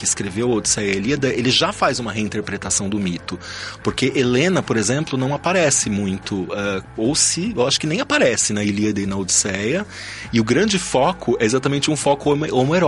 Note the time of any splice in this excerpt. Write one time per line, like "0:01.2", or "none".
none